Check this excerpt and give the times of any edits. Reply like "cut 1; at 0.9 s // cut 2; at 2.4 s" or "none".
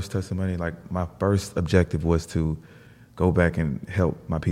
none